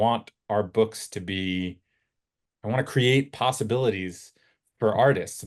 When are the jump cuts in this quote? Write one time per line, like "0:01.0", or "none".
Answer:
none